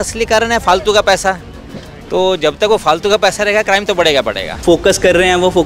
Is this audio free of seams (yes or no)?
no